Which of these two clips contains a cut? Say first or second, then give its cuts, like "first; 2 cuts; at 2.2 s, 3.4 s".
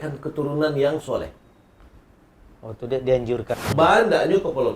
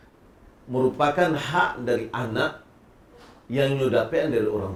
first; 1 cut; at 3.6 s